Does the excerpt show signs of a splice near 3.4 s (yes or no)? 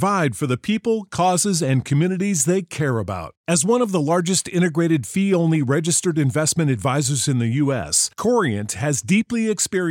no